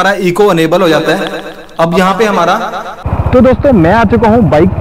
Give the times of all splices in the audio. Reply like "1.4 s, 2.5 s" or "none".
2.8 s